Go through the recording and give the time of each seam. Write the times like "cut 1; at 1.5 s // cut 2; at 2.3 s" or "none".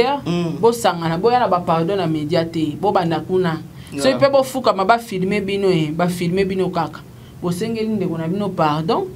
none